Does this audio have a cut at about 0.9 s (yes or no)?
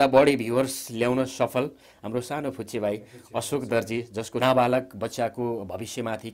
no